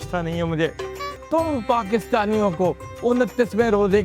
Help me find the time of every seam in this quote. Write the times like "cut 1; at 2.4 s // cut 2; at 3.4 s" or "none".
cut 1; at 1.1 s